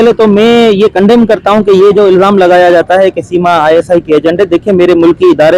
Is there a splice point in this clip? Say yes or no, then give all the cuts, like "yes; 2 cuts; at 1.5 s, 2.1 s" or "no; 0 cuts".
no; 0 cuts